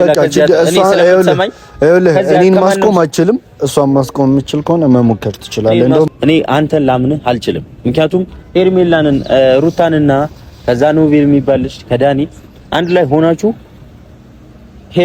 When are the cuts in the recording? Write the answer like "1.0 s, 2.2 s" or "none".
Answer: 6.1 s